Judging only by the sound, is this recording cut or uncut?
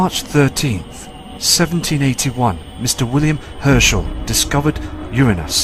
uncut